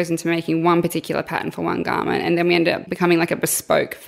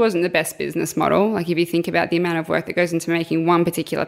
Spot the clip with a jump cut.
first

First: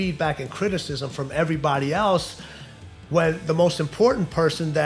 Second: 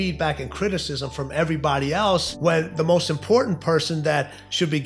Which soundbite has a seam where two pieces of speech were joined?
second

